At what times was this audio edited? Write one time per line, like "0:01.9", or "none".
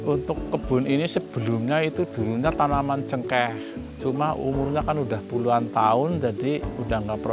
none

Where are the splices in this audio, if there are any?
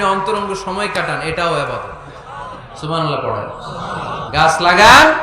0:04.2

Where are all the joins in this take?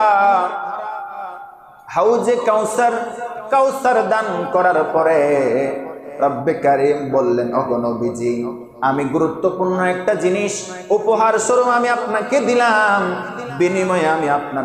none

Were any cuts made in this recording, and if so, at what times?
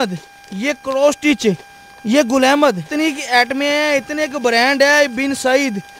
none

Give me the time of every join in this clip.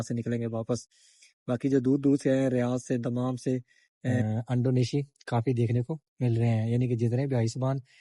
0:04.2

